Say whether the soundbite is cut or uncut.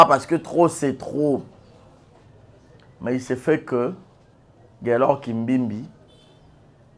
uncut